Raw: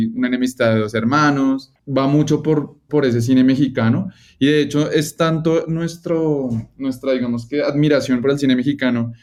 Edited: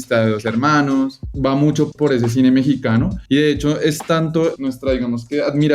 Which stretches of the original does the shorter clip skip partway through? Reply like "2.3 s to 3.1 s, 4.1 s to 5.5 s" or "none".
1.9 s to 2.4 s, 4.1 s to 4.3 s, 5.7 s to 6.8 s